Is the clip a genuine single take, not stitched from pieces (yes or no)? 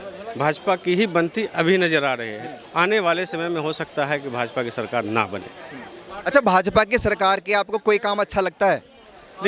yes